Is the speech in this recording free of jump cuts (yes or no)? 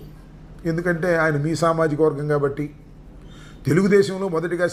yes